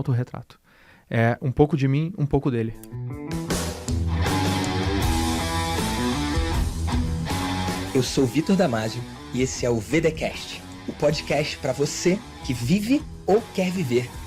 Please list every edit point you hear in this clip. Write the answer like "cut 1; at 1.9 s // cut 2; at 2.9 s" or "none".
cut 1; at 2.9 s